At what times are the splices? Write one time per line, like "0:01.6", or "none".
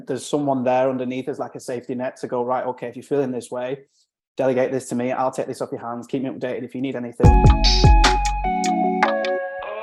0:07.3